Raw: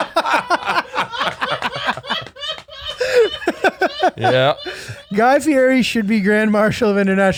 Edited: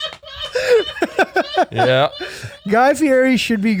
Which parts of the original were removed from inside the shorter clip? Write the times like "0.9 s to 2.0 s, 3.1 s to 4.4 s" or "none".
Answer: none

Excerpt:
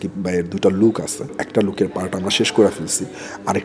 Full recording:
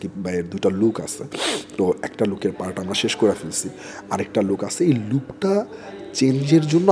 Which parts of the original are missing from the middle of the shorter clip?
1.3 s to 2.0 s

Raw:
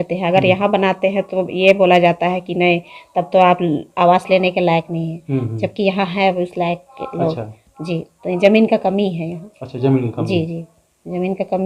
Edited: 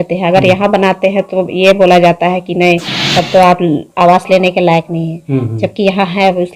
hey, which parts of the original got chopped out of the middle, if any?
none

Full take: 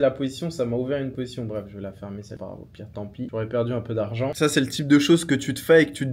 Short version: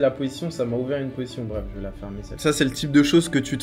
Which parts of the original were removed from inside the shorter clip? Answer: 2.4 s to 4.3 s

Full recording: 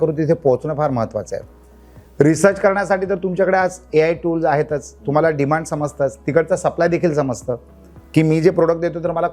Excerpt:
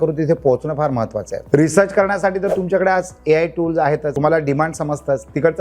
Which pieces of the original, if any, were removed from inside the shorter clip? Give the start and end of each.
1.3 s to 2.0 s, 4.8 s to 5.0 s

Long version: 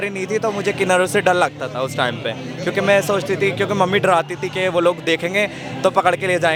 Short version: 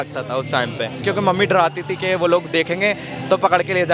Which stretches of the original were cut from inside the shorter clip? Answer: 2.5 s to 3.5 s

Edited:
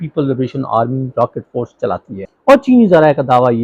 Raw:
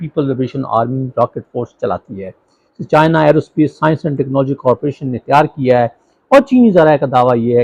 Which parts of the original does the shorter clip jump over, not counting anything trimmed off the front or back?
2.2 s to 6.1 s

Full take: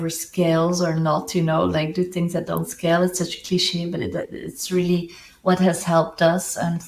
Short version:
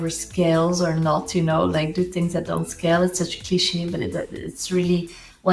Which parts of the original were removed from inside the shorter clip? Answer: none

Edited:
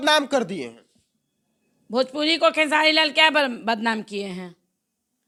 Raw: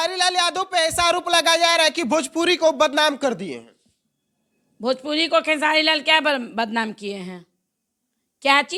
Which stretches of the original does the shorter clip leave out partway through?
none

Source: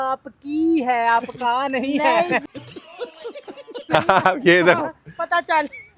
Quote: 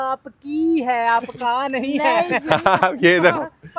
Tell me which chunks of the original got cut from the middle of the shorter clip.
2.4 s to 3.9 s

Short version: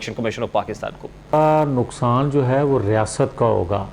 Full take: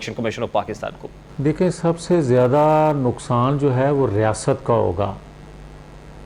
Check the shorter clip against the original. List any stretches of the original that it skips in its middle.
1.3 s to 2.6 s

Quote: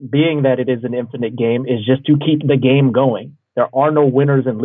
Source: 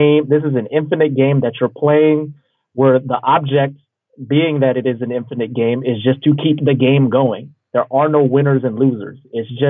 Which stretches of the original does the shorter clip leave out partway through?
none

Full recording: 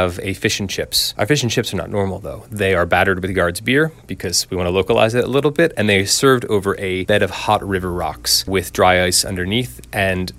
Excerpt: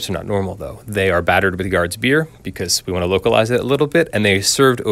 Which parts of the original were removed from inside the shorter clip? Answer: none

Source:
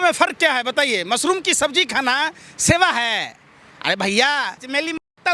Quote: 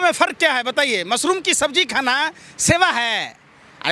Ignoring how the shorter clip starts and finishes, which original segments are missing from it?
none

